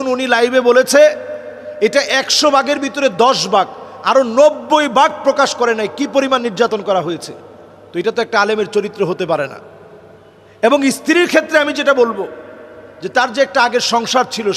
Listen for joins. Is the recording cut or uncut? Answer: uncut